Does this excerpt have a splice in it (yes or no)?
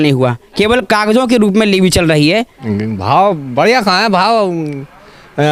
yes